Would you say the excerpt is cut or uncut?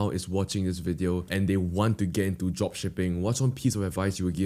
cut